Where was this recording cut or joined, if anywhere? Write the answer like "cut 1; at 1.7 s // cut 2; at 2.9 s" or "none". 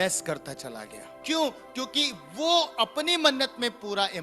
cut 1; at 1.1 s